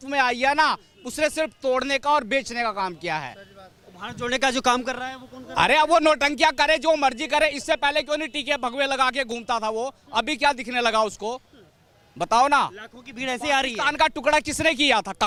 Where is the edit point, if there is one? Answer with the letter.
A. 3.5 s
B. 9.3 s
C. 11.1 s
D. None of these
D